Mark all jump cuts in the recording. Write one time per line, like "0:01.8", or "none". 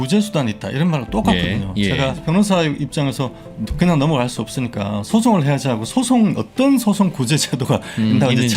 0:02.2
0:03.4